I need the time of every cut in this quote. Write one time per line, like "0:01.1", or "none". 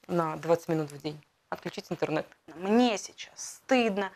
0:02.5

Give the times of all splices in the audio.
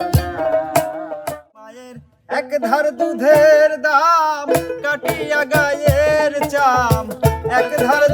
0:01.6

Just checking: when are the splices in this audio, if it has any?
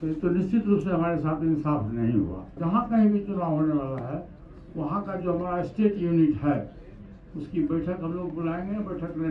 0:02.5

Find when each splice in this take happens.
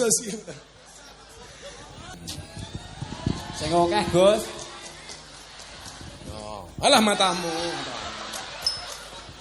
0:02.1

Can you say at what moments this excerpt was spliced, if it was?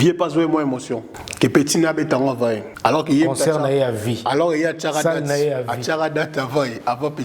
0:01.2
0:02.7

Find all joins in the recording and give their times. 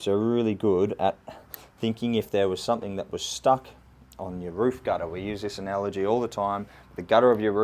none

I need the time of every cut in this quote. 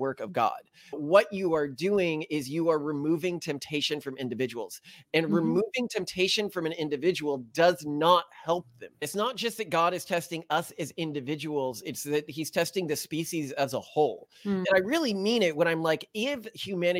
0:01.0
0:09.0

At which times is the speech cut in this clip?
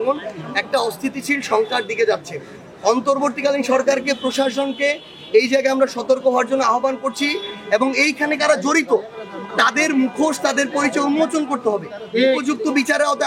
none

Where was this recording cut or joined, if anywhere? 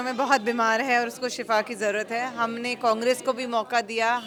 none

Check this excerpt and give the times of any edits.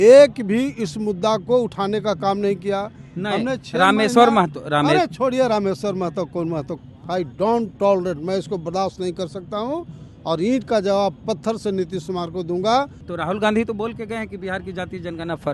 0:06.7
0:13.0

